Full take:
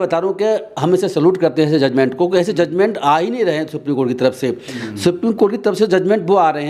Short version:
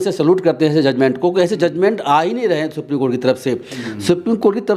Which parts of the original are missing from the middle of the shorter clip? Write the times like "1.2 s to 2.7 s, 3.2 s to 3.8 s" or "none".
none